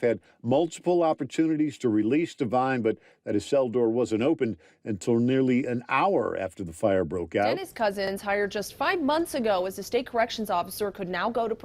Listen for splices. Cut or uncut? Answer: cut